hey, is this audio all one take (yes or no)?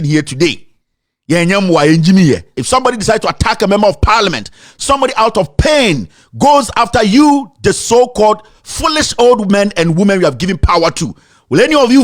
no